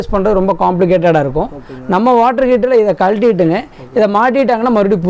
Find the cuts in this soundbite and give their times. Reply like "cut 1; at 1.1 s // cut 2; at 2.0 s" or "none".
none